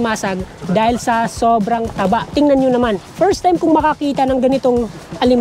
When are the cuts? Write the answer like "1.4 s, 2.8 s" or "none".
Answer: 2.3 s, 3.1 s